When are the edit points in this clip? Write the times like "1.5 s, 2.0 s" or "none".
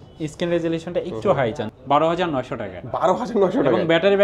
1.7 s